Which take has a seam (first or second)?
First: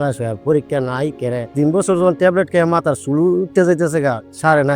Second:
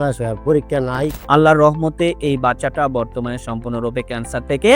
second